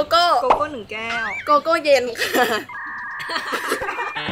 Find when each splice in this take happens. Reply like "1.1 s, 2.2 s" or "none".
none